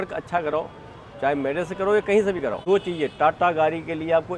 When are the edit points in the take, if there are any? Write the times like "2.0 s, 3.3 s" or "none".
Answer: 2.6 s